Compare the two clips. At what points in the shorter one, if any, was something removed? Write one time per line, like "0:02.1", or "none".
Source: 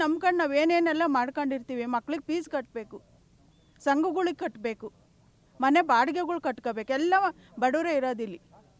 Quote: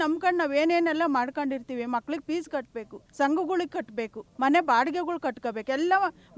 0:03.0
0:04.2